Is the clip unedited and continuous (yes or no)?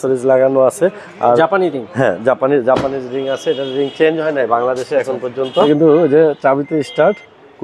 no